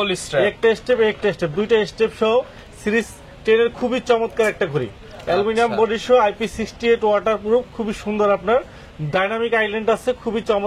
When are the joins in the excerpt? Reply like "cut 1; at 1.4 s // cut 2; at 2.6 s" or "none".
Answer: none